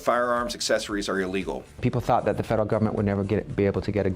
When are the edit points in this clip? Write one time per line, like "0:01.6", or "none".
0:01.7